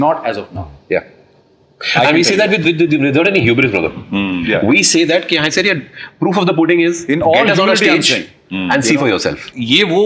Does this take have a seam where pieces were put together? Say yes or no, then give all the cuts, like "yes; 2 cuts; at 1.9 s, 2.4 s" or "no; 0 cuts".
no; 0 cuts